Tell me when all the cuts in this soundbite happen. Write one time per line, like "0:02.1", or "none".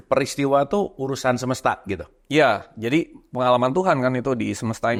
none